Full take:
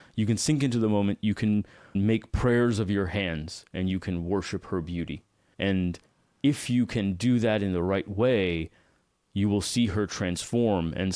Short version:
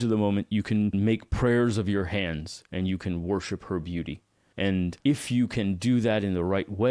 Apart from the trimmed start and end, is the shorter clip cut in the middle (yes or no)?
yes